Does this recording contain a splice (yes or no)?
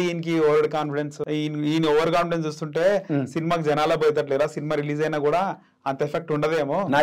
yes